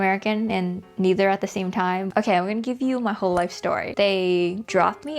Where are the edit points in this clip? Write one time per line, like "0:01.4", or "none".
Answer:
0:02.1
0:03.9